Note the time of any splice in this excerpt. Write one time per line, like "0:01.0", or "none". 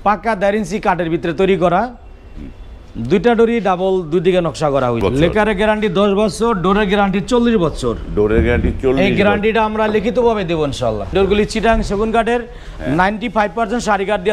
0:05.0
0:11.1